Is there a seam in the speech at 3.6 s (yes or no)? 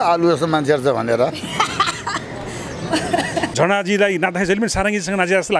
yes